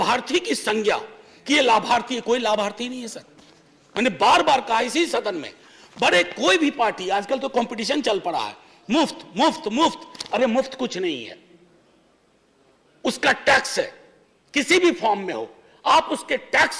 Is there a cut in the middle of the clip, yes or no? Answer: no